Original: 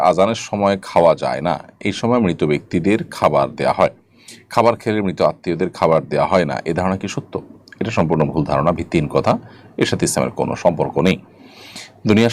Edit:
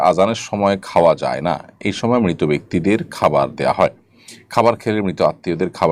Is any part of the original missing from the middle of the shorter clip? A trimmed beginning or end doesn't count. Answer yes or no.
no